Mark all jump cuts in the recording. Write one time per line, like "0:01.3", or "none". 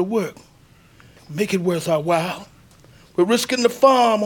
0:01.2